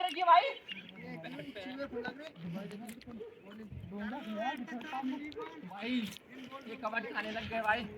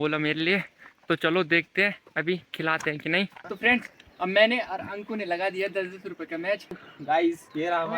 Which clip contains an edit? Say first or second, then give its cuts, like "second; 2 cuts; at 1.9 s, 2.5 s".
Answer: second; 2 cuts; at 3.5 s, 6.9 s